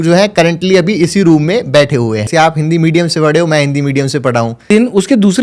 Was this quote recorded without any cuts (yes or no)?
no